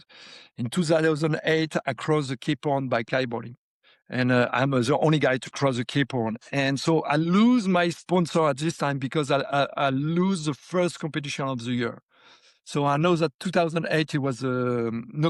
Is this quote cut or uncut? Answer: uncut